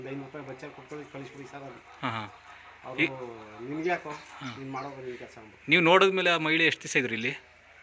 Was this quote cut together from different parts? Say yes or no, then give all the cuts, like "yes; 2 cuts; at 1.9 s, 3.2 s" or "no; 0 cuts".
yes; 1 cut; at 4.7 s